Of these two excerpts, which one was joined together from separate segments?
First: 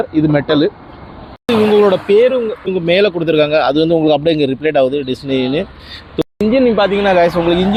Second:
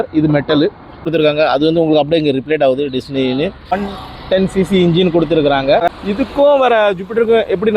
second; 3 cuts; at 1.0 s, 3.8 s, 5.9 s

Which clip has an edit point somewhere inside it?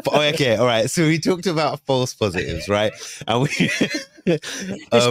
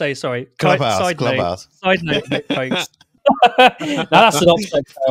second; 1 cut; at 3.0 s

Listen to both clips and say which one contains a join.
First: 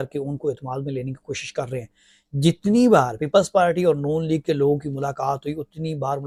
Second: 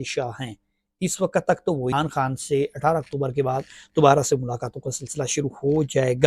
second; 1 cut; at 1.9 s

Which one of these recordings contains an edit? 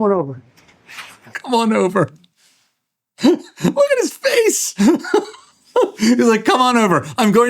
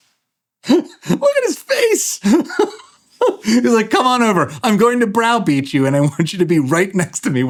first; 1 cut; at 1.2 s

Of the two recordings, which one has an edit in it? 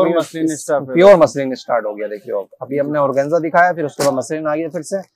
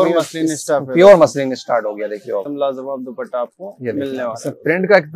second; 1 cut; at 2.5 s

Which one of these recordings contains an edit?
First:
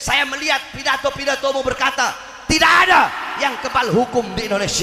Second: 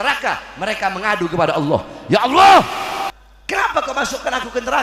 second; 1 cut; at 3.1 s

